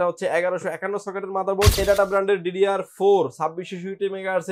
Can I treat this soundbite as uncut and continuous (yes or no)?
no